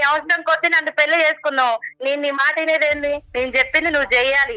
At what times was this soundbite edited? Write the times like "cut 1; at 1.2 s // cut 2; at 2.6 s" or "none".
cut 1; at 1.9 s // cut 2; at 3.3 s